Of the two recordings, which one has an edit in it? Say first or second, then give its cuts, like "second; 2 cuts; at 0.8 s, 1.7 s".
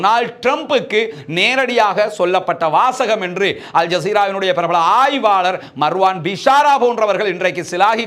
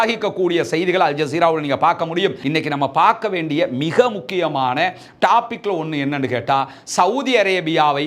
second; 1 cut; at 2.4 s